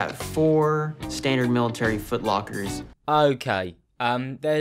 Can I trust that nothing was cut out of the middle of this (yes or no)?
yes